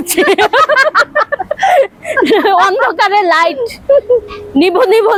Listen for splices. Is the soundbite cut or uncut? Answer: uncut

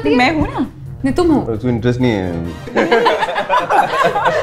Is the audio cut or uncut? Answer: cut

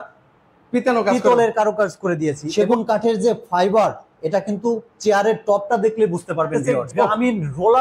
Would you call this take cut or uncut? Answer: cut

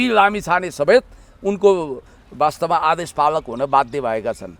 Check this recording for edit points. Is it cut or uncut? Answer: uncut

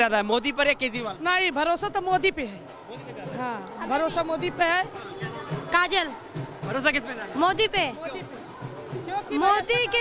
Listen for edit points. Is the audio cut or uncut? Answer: uncut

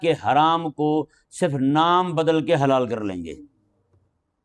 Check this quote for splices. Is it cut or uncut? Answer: uncut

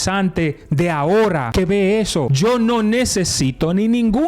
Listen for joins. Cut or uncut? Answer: cut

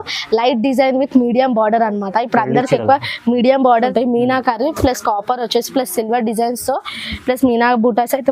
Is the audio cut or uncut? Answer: cut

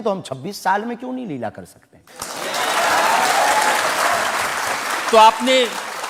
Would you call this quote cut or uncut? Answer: uncut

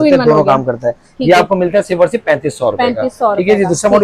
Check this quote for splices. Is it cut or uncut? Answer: uncut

